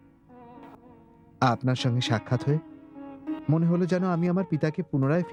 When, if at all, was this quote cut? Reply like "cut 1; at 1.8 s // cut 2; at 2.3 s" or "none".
none